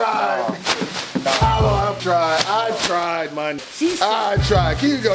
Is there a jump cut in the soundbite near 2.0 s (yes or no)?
yes